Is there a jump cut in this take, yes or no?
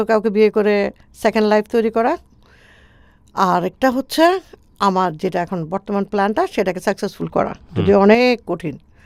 no